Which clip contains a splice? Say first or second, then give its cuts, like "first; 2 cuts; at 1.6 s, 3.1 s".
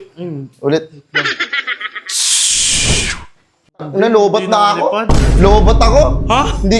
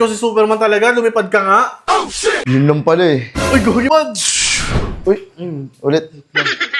second; 1 cut; at 3.9 s